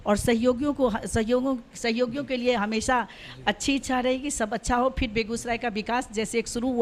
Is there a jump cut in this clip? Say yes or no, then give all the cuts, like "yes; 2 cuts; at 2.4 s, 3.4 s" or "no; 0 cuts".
no; 0 cuts